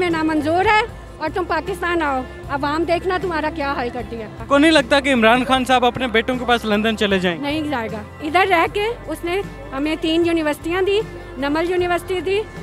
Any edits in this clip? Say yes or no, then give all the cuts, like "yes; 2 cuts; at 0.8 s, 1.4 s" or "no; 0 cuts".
no; 0 cuts